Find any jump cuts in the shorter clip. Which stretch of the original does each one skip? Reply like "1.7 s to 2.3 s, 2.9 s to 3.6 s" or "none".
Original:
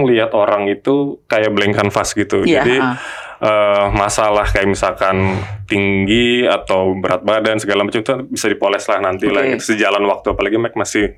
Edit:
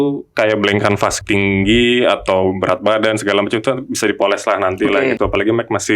2.1 s to 5.6 s, 9.6 s to 10.2 s

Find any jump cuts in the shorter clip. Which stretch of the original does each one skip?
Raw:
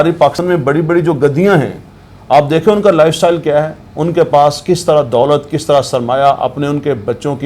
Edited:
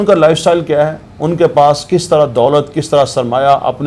none

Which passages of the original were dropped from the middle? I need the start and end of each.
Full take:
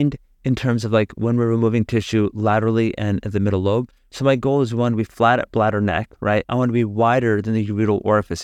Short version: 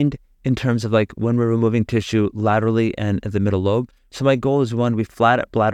none

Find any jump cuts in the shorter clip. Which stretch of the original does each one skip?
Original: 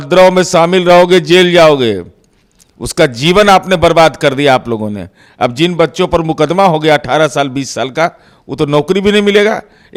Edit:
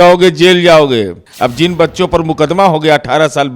2.1 s to 5.2 s

